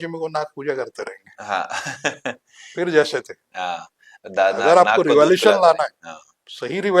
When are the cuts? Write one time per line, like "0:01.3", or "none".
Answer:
none